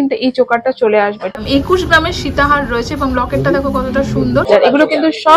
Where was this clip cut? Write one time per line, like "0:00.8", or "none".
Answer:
0:01.4
0:04.5